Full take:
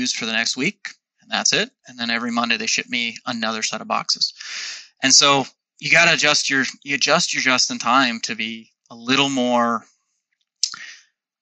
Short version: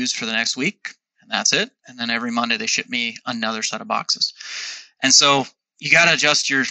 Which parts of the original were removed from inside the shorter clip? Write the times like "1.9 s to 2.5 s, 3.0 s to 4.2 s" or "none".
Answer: none